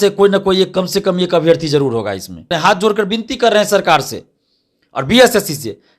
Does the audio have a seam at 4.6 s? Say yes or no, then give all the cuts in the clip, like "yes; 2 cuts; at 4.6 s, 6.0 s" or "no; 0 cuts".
no; 1 cut; at 2.5 s